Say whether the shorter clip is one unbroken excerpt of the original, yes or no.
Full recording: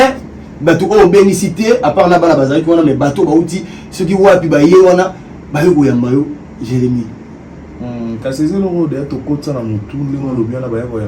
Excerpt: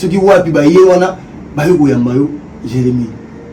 yes